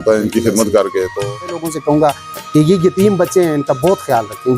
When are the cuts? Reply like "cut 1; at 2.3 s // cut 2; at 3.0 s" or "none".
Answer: cut 1; at 1.2 s